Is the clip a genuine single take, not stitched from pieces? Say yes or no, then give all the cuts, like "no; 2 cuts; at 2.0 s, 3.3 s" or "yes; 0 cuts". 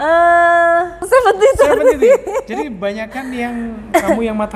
no; 1 cut; at 1.0 s